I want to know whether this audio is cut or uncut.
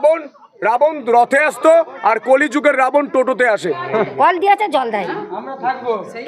cut